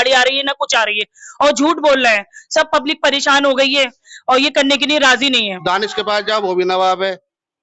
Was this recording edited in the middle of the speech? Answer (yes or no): yes